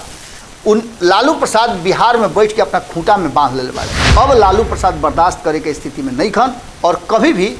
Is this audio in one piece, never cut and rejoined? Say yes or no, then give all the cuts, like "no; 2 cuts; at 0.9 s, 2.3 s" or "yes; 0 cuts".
no; 1 cut; at 4.1 s